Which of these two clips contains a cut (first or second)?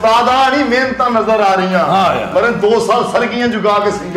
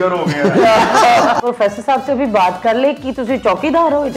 second